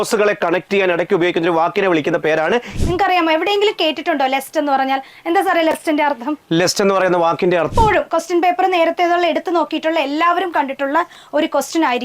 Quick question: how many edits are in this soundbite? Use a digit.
2